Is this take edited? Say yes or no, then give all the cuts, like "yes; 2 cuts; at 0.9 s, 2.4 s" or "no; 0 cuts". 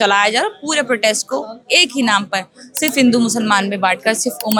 no; 0 cuts